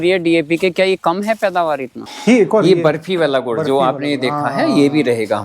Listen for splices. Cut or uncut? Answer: cut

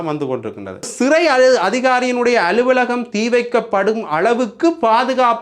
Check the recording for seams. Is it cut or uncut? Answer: cut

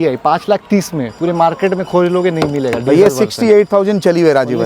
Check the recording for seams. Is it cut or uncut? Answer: uncut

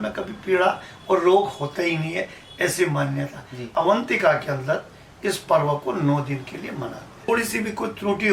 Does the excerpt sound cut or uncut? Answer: cut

